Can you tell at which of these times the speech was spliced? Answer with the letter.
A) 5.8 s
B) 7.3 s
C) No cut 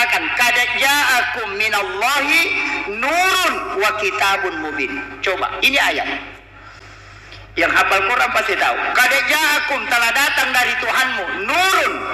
C